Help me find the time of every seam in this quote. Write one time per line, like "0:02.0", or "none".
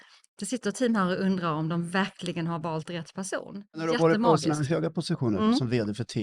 0:03.8

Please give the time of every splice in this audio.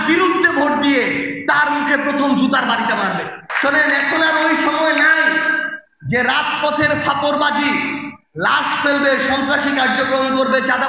0:03.4

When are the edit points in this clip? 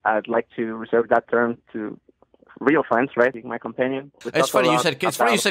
0:01.7
0:03.9

